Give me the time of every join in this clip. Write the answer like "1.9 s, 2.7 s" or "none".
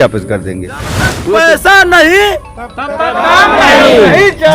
1.1 s